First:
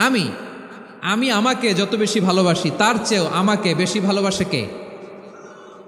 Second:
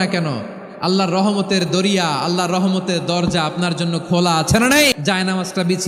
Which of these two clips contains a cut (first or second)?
second